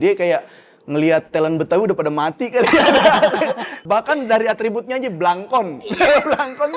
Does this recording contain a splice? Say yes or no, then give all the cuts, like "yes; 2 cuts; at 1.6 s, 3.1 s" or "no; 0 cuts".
yes; 1 cut; at 3.8 s